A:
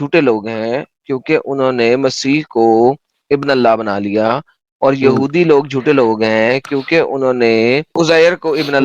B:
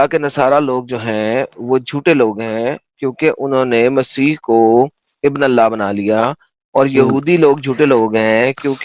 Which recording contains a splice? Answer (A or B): A